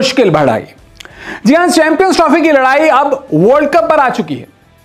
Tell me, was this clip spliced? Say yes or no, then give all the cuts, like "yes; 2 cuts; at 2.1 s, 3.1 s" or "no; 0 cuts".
no; 0 cuts